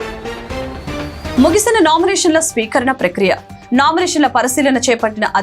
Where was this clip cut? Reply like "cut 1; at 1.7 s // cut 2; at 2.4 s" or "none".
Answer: cut 1; at 1.3 s

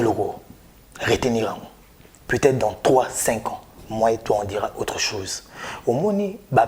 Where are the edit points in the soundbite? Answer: none

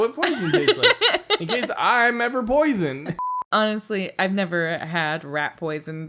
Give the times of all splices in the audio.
cut 1; at 3.3 s

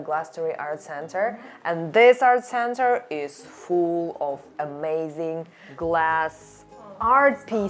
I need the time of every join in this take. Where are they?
none

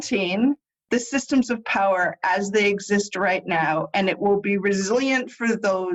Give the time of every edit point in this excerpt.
none

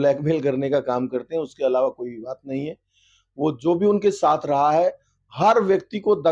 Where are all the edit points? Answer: none

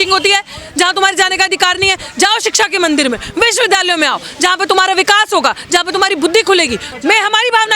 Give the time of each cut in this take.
cut 1; at 6.8 s

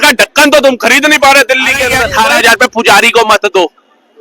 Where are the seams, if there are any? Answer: cut 1; at 2.0 s

